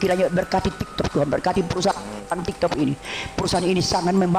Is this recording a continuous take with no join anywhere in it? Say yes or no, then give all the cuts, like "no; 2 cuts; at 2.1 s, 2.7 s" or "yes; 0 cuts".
no; 1 cut; at 2.1 s